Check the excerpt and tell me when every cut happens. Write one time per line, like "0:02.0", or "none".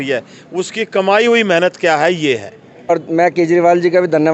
0:02.9